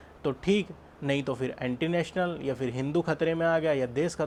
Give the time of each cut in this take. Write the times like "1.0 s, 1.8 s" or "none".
none